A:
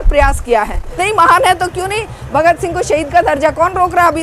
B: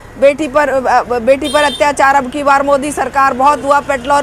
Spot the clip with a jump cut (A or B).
A